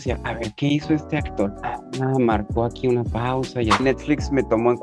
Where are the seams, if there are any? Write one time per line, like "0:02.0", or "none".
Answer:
0:03.8

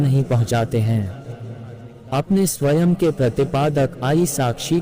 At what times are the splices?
0:02.0

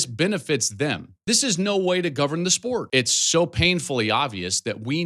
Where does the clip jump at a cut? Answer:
0:01.1
0:02.9

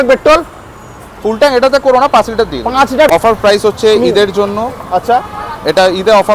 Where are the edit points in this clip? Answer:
0:03.1

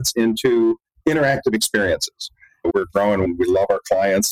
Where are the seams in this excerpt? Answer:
0:02.6

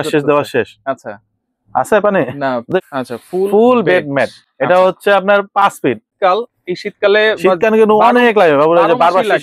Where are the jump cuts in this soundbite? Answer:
0:02.6
0:06.1

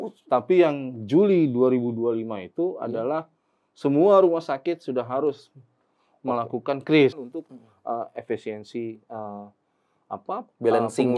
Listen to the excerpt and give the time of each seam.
0:07.3

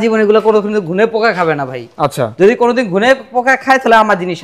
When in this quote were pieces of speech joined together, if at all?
none

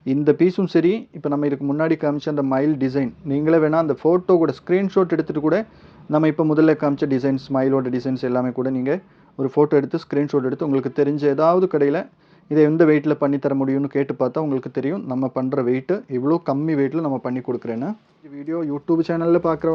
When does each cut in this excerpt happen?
0:18.5

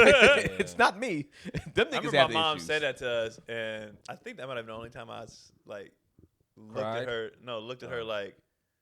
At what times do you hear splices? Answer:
0:04.0

